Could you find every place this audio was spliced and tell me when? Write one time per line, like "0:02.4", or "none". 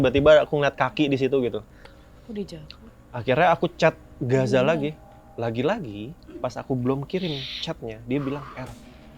0:05.1